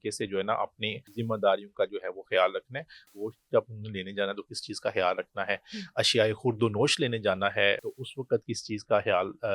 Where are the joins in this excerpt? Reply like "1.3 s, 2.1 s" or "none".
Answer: 1.1 s, 3.1 s, 7.8 s